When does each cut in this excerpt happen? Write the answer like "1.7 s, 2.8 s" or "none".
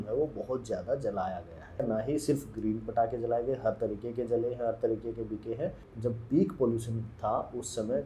1.8 s, 5.9 s